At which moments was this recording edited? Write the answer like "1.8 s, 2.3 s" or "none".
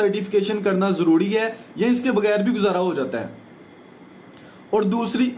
none